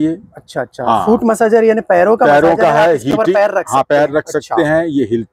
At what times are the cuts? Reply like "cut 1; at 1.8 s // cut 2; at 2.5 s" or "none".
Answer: none